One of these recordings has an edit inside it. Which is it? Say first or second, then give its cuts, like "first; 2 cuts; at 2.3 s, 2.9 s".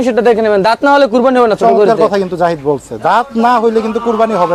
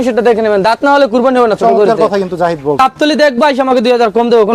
second; 1 cut; at 2.8 s